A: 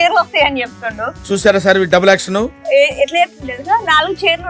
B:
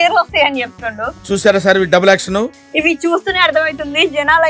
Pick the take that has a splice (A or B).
B